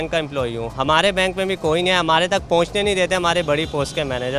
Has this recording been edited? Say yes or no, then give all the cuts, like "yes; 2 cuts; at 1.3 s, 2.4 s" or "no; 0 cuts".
no; 0 cuts